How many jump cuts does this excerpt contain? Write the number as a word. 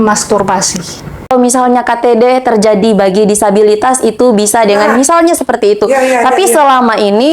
one